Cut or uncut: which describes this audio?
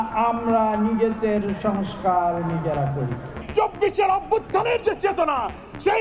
cut